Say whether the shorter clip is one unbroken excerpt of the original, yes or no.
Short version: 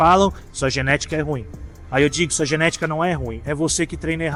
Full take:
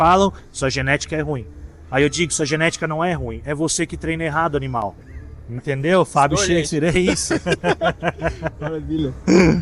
yes